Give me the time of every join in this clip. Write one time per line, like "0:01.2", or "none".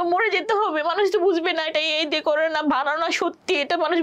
none